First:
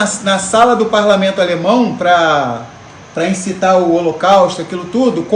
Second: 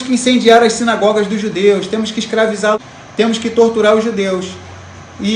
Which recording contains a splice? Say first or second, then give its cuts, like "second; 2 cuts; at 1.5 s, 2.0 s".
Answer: second; 1 cut; at 2.9 s